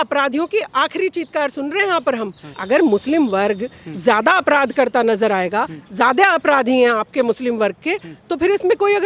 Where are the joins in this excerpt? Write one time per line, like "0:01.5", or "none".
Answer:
0:02.5